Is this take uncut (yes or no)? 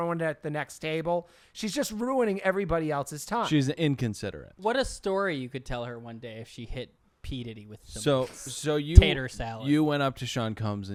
yes